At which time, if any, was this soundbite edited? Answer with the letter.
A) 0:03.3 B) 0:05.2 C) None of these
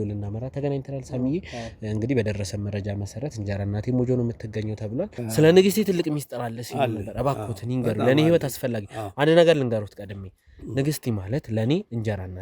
B